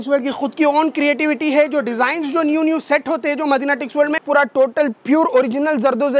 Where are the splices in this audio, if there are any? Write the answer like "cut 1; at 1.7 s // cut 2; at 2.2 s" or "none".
cut 1; at 4.2 s